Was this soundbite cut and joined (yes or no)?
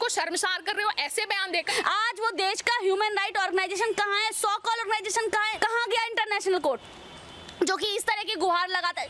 yes